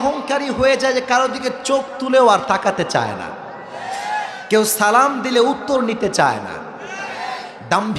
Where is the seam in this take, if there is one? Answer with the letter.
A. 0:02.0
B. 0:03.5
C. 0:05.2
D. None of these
D